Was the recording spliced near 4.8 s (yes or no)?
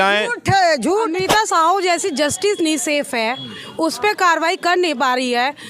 no